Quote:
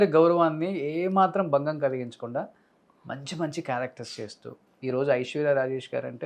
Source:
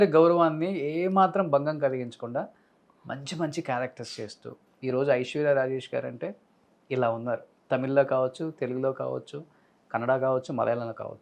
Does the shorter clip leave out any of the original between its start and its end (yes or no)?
no